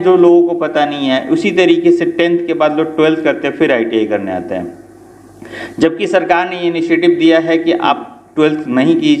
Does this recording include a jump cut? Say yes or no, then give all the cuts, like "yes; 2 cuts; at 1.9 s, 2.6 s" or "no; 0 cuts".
no; 0 cuts